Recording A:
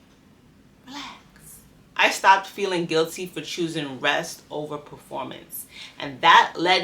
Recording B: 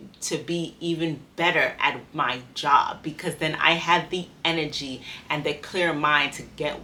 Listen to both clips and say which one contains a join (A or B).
A